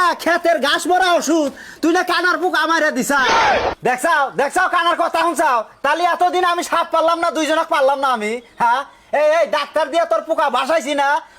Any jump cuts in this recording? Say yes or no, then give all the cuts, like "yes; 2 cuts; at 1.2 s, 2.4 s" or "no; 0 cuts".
yes; 1 cut; at 3.7 s